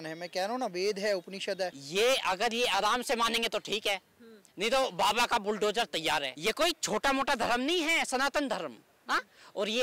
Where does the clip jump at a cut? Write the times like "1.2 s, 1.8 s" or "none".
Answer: 1.8 s, 6.3 s